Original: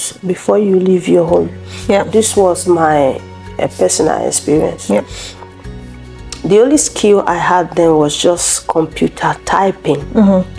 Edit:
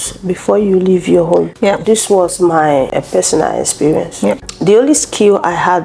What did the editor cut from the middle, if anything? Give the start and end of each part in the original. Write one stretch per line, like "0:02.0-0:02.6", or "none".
0:01.5-0:01.8
0:03.2-0:03.6
0:05.2-0:06.3